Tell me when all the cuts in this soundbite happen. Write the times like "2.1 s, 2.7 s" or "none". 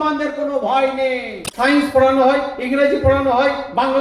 1.7 s